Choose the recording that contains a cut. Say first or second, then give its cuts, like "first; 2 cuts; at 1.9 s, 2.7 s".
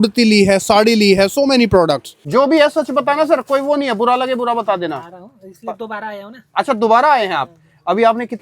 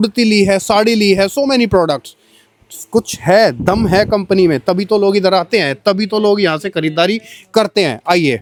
first; 1 cut; at 2.1 s